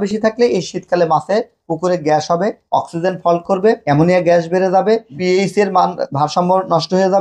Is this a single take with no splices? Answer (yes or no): yes